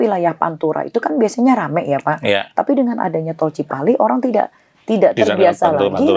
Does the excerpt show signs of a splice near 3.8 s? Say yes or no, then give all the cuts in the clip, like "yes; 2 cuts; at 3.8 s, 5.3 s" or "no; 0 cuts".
no; 0 cuts